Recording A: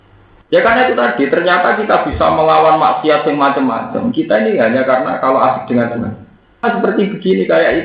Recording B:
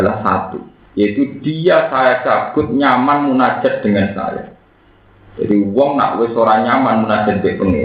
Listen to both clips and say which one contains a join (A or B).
A